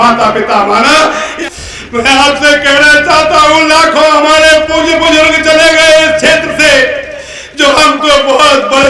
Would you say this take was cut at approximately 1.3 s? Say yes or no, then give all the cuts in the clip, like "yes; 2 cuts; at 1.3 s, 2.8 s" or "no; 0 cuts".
yes; 1 cut; at 1.3 s